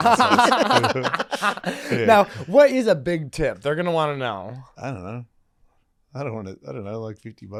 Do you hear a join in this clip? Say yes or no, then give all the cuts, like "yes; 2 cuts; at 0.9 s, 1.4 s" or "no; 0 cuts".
no; 0 cuts